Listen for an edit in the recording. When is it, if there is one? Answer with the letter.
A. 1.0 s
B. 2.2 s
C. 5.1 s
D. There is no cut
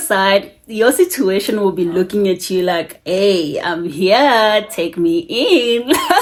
D